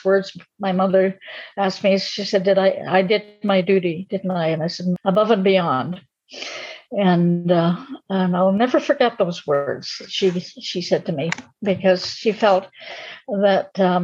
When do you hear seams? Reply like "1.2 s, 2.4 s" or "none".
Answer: 4.9 s